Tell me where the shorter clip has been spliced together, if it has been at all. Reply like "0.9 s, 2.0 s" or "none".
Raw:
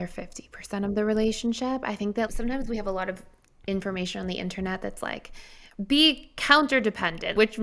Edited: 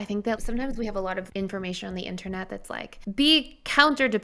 1.3 s, 2.9 s